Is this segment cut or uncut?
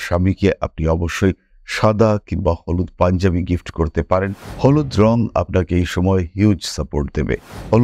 cut